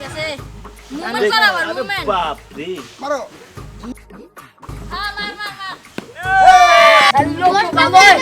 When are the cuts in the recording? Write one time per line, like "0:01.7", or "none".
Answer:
0:07.1